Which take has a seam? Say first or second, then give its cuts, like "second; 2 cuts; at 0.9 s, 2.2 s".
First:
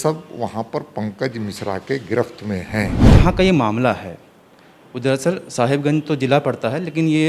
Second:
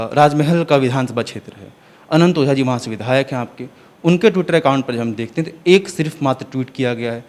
first; 1 cut; at 3.0 s